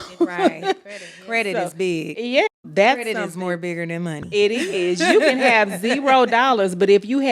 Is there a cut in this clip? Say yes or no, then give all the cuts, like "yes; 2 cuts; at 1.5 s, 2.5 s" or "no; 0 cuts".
yes; 1 cut; at 2.5 s